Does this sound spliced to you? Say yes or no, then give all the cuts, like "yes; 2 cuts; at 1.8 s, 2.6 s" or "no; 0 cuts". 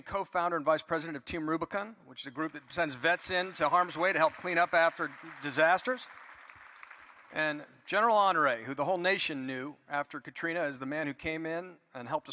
yes; 1 cut; at 8.9 s